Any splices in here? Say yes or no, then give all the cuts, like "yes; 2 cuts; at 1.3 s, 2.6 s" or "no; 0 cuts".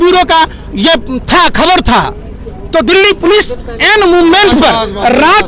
no; 0 cuts